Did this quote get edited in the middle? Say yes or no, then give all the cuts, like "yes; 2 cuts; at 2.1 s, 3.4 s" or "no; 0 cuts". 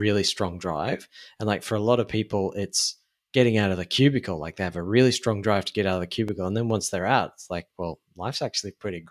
no; 0 cuts